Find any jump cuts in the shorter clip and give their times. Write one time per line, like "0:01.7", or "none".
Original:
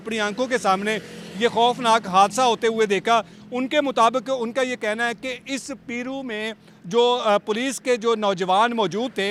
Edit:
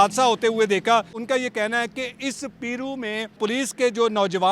0:01.2
0:03.4